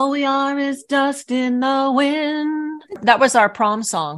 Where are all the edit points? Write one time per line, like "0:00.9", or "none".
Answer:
0:03.0